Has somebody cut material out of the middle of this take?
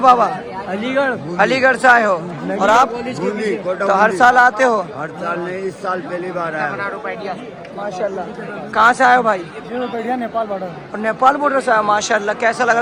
no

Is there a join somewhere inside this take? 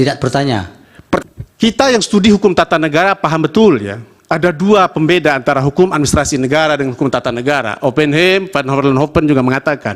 yes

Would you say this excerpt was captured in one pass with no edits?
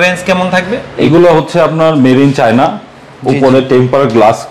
no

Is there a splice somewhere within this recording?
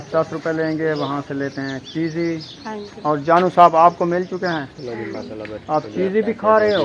no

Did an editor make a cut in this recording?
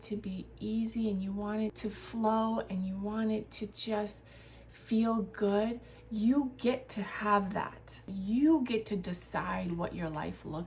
yes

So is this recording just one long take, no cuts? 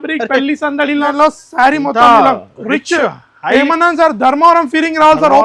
no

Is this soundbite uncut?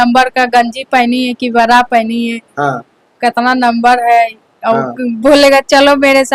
yes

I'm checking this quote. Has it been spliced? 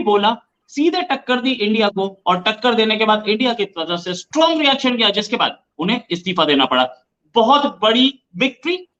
no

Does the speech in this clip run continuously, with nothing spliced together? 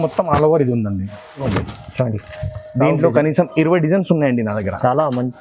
no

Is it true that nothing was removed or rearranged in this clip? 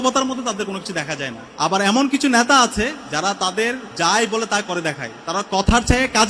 no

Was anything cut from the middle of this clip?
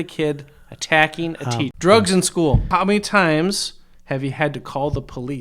yes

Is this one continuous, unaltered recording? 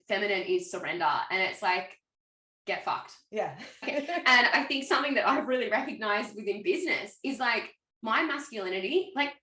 no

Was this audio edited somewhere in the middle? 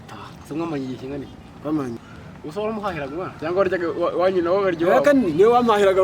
yes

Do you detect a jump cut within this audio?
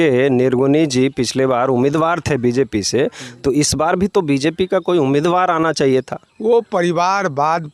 yes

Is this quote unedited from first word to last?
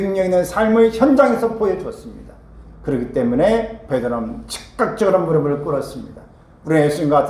yes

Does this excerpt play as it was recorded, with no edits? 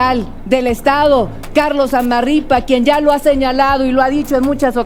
yes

